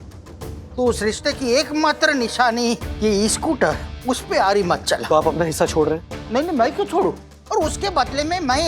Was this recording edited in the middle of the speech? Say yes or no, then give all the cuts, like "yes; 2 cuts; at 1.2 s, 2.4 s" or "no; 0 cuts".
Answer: yes; 2 cuts; at 5.0 s, 7.3 s